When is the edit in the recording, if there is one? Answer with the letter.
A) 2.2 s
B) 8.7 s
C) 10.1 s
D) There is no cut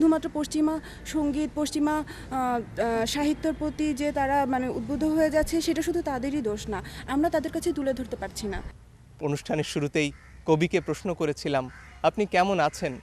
B